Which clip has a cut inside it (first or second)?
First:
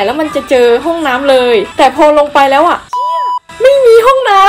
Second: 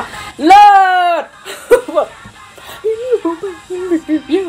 first